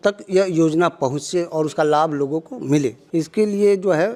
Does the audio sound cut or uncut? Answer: uncut